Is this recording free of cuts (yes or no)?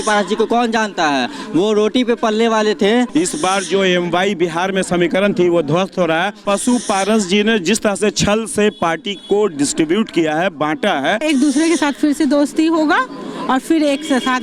no